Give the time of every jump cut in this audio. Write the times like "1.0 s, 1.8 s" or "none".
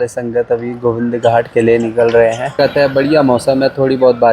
2.5 s